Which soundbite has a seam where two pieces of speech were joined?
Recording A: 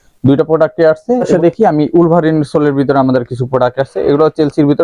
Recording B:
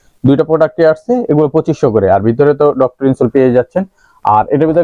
A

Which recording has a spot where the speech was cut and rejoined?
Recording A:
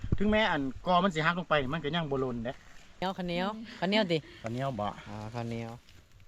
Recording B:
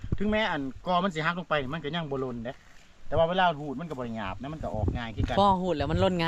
A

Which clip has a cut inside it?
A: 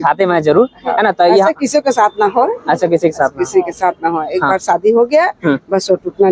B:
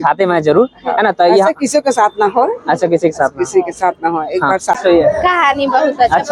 B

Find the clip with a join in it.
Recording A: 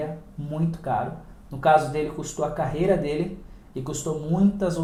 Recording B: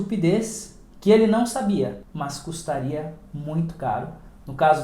B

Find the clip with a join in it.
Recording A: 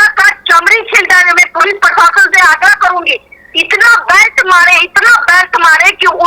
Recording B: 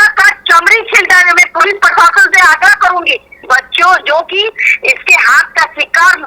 B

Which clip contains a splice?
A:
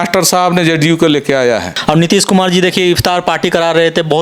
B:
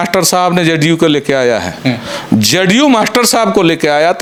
A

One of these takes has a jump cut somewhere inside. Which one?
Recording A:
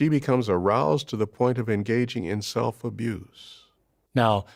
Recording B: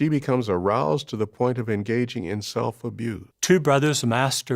B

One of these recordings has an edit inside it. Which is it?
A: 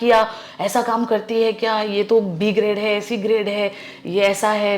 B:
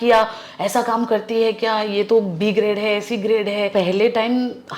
B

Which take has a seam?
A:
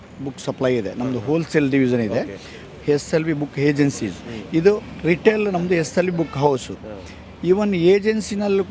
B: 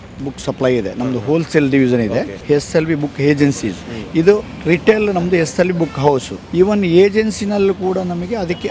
B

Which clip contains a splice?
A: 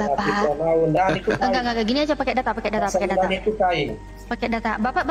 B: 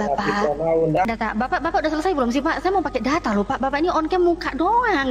B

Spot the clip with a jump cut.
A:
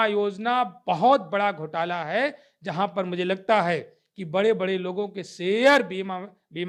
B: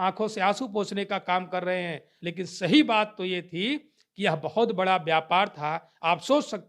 B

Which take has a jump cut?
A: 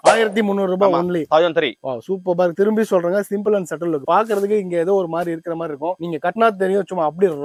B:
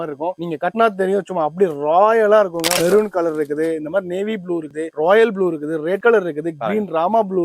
B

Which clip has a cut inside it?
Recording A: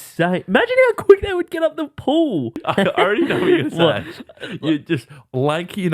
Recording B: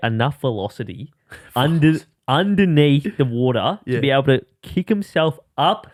A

